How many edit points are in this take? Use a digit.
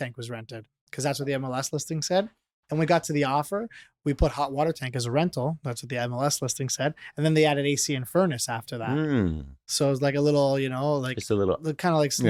0